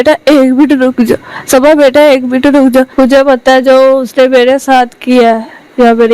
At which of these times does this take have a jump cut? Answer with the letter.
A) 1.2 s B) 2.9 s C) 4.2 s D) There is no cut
B